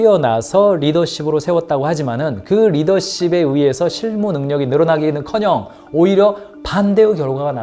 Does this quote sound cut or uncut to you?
uncut